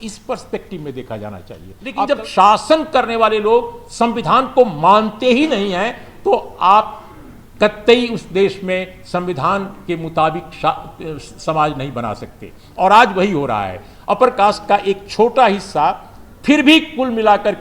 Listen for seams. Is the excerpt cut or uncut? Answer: cut